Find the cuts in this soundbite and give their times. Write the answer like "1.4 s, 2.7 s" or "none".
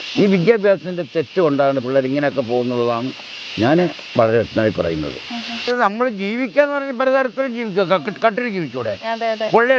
5.7 s